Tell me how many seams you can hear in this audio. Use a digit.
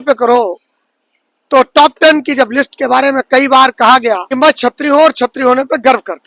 1